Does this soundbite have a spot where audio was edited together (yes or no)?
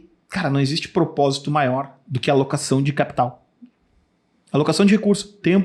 no